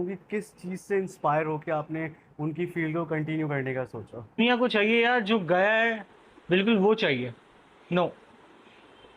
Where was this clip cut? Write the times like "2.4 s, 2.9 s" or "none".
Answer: 4.4 s

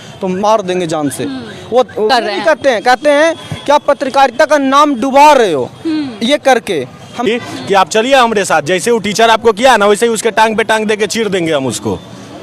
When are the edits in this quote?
2.1 s, 7.3 s

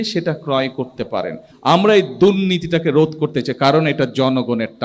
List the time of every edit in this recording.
1.4 s

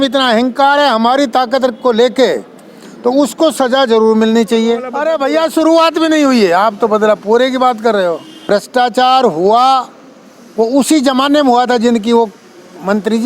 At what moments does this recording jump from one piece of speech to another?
4.9 s, 8.4 s

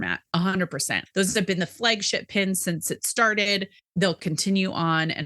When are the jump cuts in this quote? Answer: 0.9 s, 3.8 s

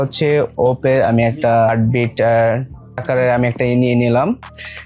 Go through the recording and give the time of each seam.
3.0 s

